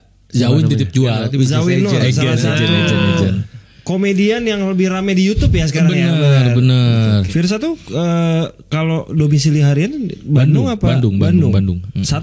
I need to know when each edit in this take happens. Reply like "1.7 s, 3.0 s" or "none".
1.2 s, 7.3 s